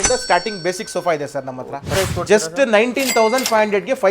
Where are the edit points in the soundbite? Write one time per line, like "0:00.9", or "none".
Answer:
0:01.9